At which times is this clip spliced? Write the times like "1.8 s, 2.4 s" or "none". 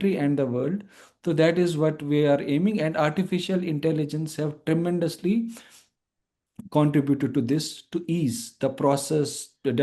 none